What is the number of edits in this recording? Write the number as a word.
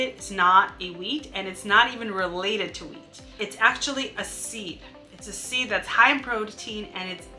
one